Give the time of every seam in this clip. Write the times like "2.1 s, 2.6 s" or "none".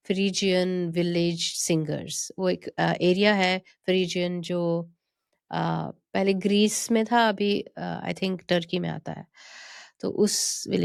none